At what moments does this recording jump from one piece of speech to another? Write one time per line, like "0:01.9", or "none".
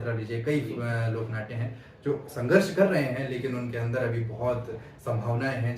none